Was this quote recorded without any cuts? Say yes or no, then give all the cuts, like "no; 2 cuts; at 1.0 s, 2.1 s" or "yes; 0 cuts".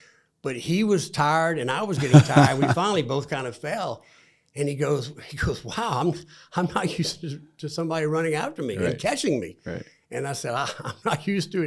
yes; 0 cuts